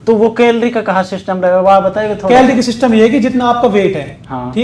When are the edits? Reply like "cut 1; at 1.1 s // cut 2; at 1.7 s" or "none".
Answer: none

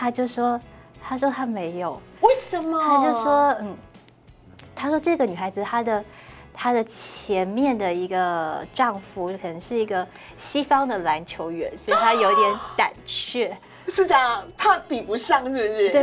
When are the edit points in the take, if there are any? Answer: none

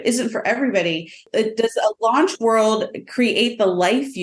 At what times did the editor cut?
cut 1; at 1.2 s

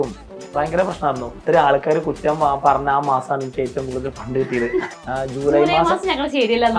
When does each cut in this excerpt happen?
cut 1; at 1.4 s // cut 2; at 5.0 s

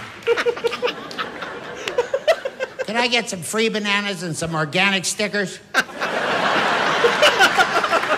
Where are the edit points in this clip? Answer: none

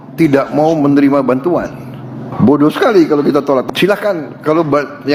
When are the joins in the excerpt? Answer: none

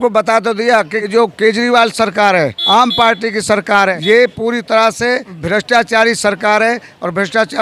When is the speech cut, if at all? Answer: cut 1; at 1.1 s // cut 2; at 2.6 s // cut 3; at 4.0 s // cut 4; at 5.3 s

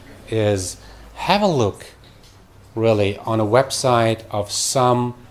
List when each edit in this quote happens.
cut 1; at 3.5 s

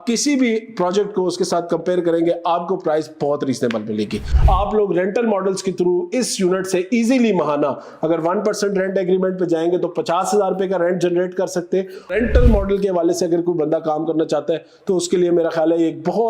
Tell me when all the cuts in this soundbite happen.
cut 1; at 4.3 s // cut 2; at 12.1 s

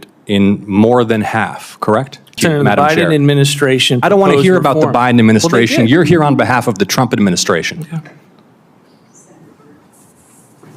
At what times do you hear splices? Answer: cut 1; at 2.4 s

